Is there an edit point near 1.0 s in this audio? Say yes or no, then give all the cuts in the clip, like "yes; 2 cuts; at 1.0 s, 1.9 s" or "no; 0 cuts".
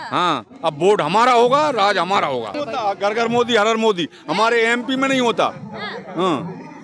no; 1 cut; at 2.6 s